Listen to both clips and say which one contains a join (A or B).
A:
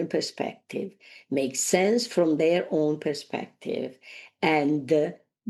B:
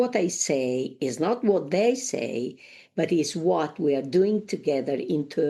B